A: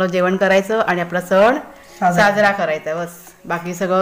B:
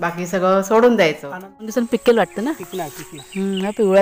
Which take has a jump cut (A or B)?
B